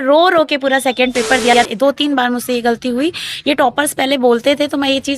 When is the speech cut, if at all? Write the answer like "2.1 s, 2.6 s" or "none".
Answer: 1.6 s